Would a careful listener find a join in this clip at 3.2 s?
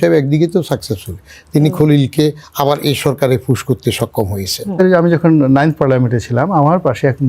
no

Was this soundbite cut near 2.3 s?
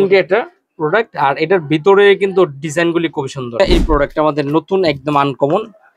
no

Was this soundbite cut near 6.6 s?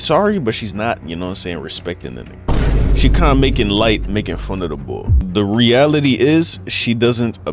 no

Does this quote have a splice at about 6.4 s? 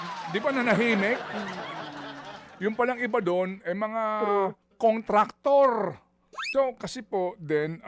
yes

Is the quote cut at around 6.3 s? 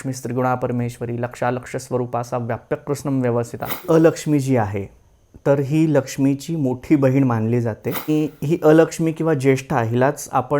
no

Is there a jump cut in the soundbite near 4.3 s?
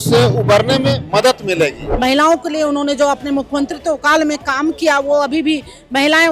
no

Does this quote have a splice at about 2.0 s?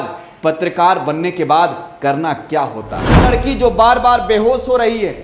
no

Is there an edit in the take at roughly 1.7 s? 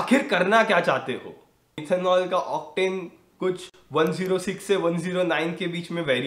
yes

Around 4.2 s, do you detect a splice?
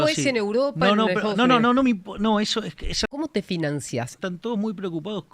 yes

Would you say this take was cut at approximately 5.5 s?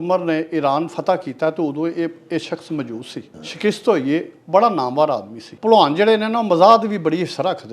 yes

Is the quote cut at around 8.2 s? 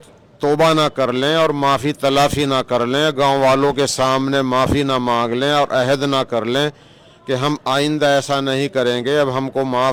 no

